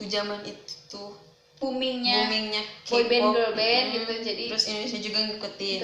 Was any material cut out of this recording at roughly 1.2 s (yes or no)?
no